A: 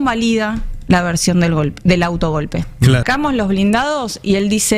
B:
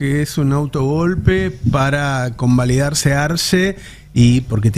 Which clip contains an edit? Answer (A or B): A